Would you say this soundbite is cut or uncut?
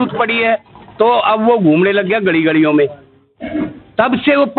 uncut